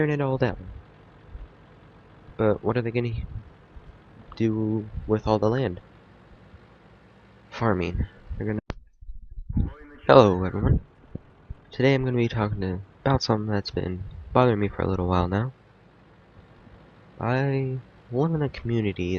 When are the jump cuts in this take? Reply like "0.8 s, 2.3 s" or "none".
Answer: none